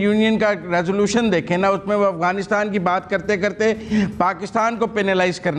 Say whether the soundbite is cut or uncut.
uncut